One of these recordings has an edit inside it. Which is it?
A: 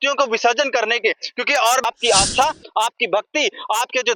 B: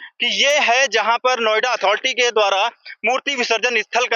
A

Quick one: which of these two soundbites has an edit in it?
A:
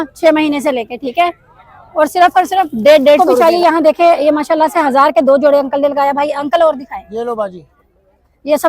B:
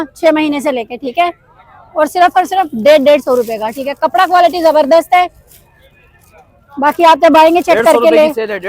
A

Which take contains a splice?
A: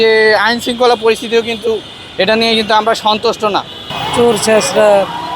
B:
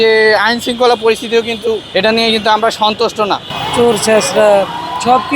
B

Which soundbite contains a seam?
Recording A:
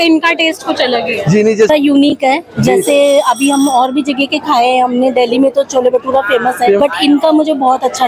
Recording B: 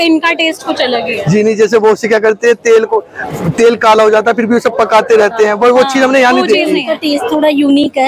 A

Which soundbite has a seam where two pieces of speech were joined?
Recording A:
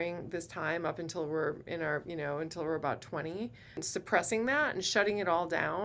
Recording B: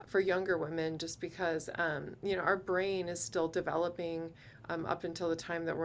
A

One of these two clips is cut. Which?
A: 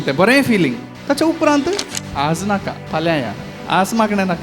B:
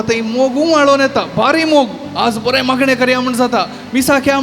A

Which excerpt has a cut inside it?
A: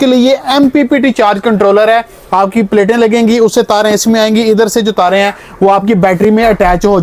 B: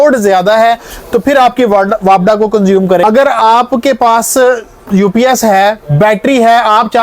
B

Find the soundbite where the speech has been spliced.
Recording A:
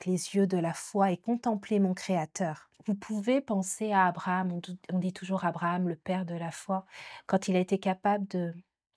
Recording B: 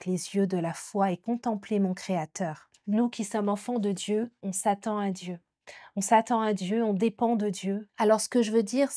B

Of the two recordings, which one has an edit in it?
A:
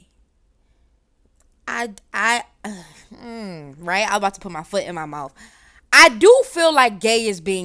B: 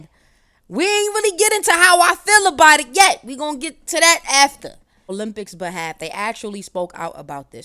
B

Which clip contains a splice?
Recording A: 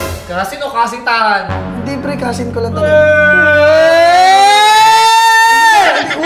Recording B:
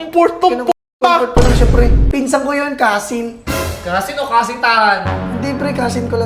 B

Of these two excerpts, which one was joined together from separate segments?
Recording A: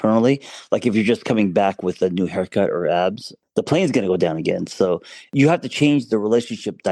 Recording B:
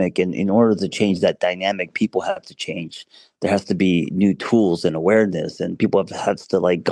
A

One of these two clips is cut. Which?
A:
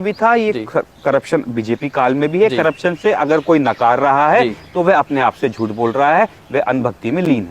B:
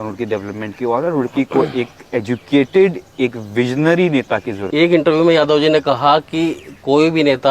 B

